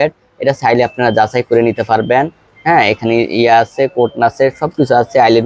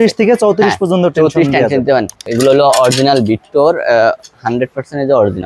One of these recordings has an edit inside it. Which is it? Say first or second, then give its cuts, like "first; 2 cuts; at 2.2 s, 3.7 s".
second; 1 cut; at 2.3 s